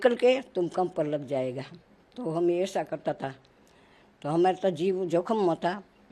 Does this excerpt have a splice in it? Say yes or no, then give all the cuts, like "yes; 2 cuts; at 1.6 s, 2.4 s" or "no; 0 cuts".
no; 0 cuts